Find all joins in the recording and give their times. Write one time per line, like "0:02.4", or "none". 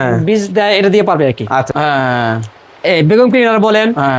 0:01.7